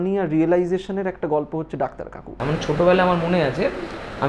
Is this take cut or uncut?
cut